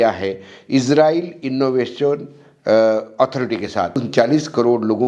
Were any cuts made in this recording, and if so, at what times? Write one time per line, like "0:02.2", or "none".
0:04.0